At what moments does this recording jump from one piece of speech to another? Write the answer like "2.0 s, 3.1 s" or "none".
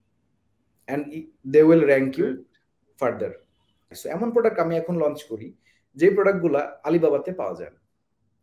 3.9 s